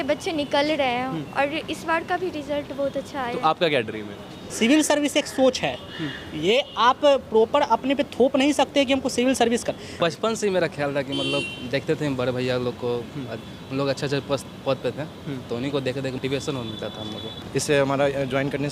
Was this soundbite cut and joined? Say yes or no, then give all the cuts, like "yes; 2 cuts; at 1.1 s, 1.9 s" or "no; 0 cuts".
yes; 3 cuts; at 4.4 s, 10.0 s, 17.4 s